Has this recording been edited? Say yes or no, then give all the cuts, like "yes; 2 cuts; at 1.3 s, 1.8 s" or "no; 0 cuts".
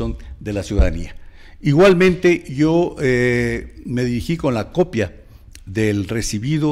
no; 0 cuts